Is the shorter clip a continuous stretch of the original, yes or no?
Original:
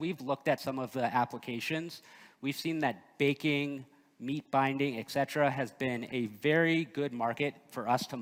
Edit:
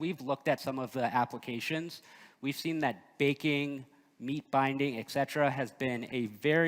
yes